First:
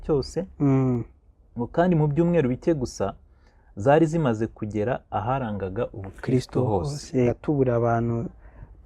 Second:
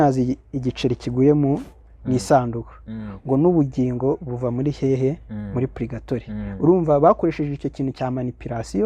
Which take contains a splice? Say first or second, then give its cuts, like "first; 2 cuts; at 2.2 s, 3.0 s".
first; 1 cut; at 7.4 s